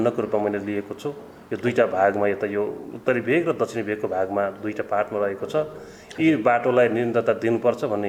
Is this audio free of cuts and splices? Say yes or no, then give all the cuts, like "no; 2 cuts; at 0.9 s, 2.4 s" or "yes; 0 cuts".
yes; 0 cuts